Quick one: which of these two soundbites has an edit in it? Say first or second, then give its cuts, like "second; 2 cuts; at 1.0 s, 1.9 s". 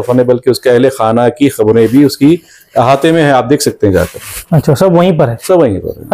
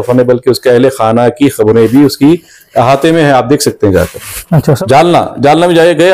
second; 1 cut; at 4.8 s